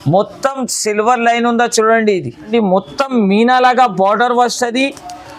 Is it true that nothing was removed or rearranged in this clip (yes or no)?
no